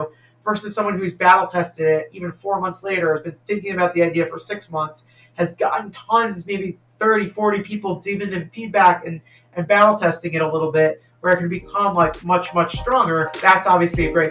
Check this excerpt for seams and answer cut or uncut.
cut